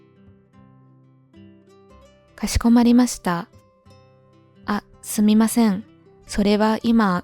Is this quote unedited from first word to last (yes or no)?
no